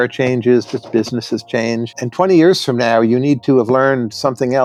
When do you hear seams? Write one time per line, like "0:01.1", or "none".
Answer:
none